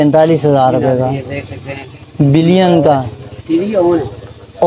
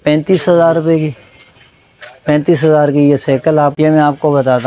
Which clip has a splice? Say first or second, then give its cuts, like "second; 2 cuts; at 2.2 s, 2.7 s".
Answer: second; 1 cut; at 3.7 s